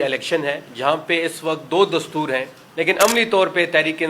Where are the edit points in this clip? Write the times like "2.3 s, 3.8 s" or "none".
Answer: 2.6 s